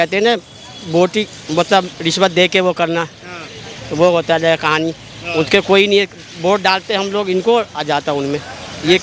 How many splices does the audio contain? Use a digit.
0